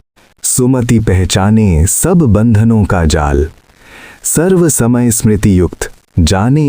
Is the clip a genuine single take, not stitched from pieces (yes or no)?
yes